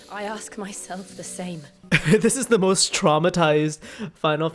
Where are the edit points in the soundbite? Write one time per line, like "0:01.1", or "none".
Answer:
0:01.8